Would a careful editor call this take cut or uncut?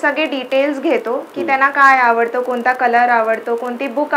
uncut